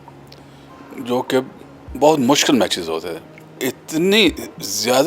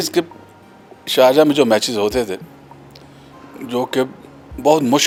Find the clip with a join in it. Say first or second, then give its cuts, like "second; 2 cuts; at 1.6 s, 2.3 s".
first; 1 cut; at 3.6 s